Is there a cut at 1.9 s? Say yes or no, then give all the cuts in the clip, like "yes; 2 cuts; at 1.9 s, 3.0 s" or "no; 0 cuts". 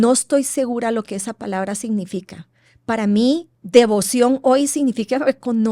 no; 1 cut; at 3.6 s